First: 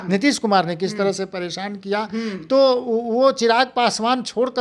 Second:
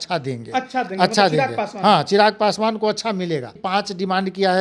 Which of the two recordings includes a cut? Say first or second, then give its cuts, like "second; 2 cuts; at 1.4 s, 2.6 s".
second; 1 cut; at 3.6 s